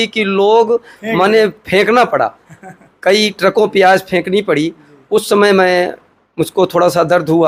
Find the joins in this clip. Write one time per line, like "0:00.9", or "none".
none